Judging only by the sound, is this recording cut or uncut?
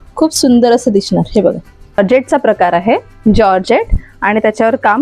cut